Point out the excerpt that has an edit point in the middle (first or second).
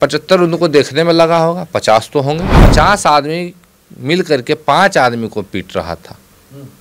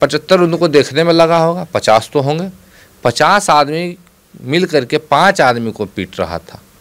first